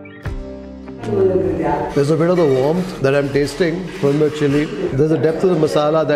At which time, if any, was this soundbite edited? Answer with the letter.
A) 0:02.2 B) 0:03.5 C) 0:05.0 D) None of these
D